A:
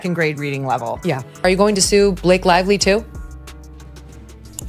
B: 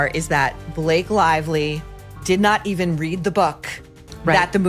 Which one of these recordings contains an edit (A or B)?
A